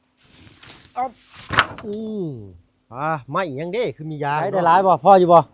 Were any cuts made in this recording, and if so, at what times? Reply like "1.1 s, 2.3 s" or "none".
4.5 s